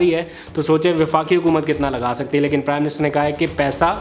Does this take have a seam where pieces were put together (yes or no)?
no